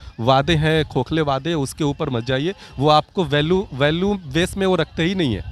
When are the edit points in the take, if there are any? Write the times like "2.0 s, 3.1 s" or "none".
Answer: none